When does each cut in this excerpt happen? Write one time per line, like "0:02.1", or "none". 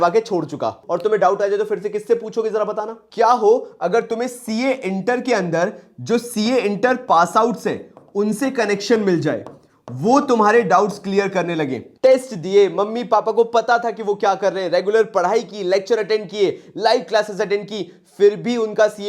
0:00.9
0:03.0
0:11.8